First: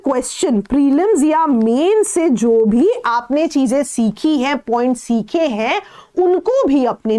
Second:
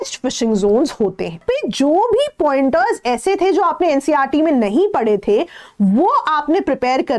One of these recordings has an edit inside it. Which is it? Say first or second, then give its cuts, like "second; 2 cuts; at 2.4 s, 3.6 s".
second; 1 cut; at 1.4 s